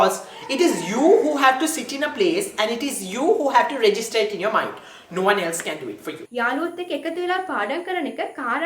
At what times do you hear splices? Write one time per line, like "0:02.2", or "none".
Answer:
0:06.2